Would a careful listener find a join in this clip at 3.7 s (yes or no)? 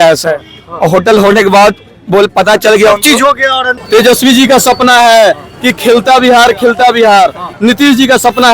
yes